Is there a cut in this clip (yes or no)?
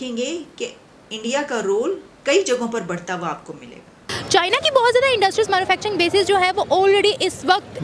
yes